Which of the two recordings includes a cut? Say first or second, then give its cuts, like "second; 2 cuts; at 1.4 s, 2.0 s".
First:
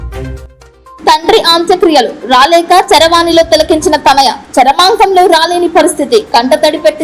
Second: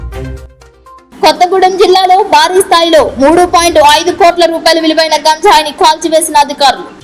first; 1 cut; at 1.0 s